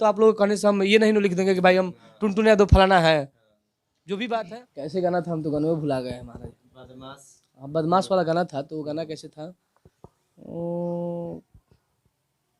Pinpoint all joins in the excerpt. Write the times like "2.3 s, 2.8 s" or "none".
4.6 s